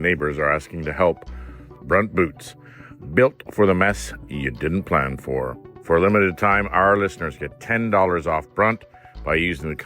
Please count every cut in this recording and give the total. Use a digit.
2